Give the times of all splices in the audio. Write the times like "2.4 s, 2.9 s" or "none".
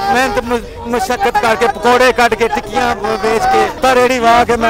3.8 s